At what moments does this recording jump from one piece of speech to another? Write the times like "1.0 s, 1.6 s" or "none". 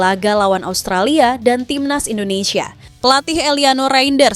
2.8 s